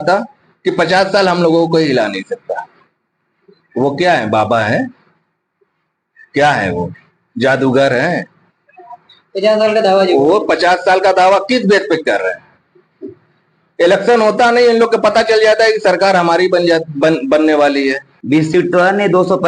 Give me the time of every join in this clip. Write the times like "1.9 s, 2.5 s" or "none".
18.1 s